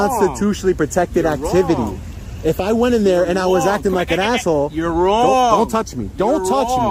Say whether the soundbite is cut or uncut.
uncut